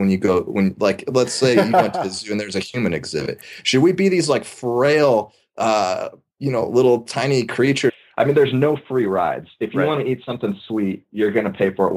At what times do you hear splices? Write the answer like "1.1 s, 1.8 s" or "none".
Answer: 7.9 s